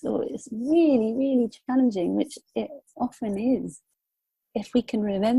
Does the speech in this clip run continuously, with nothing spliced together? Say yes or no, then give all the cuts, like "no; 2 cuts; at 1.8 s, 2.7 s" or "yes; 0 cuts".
no; 1 cut; at 4.4 s